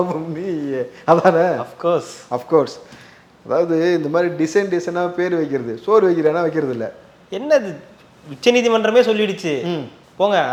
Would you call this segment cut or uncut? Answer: uncut